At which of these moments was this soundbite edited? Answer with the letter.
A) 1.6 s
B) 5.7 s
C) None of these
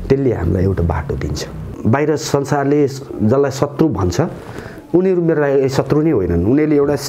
A